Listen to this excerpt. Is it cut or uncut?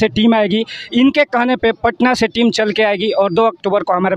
uncut